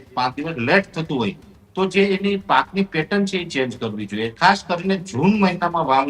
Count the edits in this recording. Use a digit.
1